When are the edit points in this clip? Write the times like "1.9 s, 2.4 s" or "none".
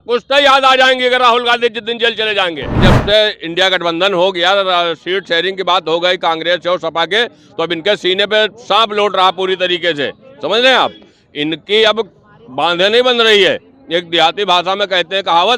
2.8 s